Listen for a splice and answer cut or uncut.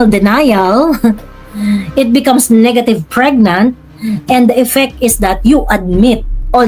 uncut